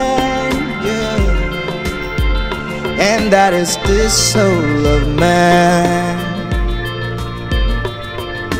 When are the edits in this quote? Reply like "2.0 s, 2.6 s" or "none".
none